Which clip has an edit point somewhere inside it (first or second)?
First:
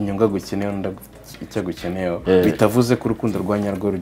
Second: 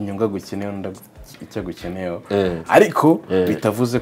first